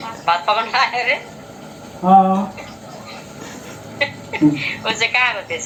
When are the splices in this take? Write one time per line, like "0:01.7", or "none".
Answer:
none